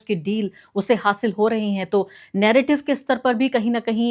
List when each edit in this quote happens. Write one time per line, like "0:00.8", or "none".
none